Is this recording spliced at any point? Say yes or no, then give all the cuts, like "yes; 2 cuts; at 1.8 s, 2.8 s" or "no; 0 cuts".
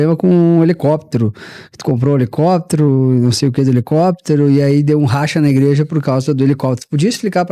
no; 0 cuts